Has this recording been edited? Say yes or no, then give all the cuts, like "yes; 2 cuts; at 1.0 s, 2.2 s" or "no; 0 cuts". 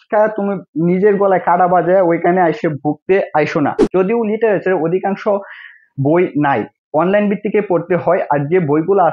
yes; 1 cut; at 3.8 s